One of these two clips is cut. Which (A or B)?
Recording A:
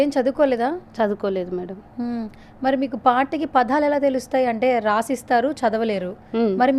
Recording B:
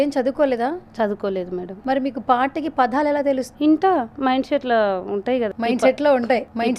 B